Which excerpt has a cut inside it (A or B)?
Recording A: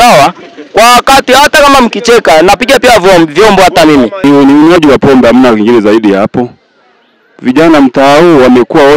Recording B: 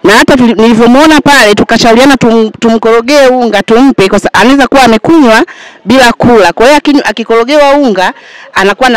A